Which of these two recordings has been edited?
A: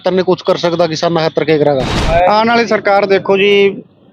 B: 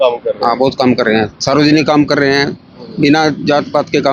A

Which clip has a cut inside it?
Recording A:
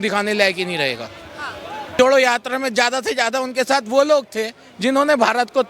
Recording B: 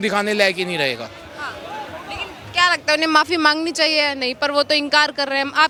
A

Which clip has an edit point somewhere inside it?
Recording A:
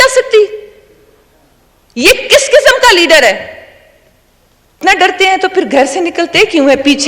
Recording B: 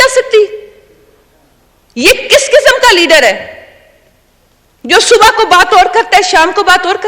A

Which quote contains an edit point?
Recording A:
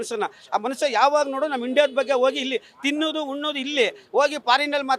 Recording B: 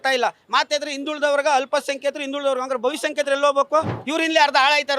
B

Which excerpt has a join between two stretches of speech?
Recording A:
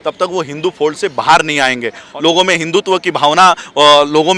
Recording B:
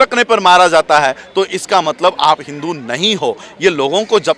A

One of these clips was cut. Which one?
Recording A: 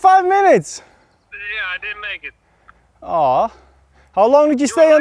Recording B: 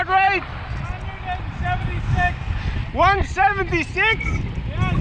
A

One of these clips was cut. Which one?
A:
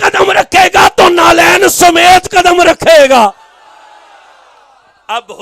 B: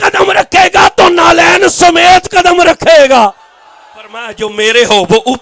B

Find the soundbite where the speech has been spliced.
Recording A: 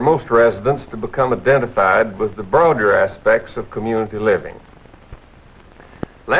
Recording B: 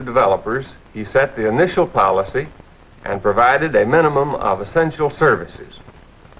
B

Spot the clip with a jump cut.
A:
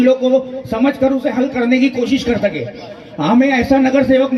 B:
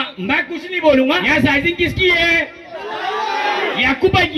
B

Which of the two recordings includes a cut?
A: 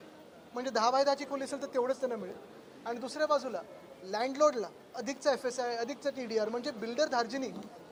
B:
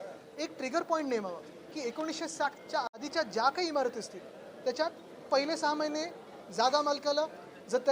B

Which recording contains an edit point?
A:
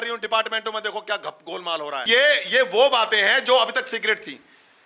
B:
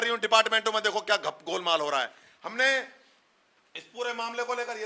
A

